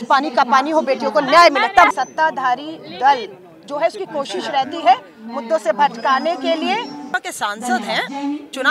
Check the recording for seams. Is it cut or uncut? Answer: cut